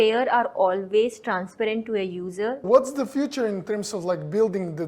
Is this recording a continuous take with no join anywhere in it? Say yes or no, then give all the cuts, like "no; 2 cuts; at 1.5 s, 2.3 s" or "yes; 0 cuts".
no; 1 cut; at 2.6 s